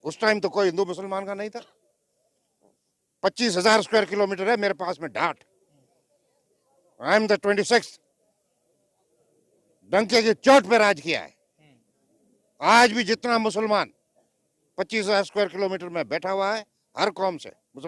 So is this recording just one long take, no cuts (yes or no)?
yes